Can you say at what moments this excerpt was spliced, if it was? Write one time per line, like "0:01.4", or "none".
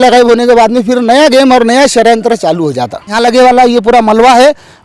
0:03.1